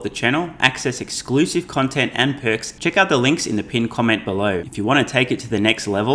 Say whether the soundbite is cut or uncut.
cut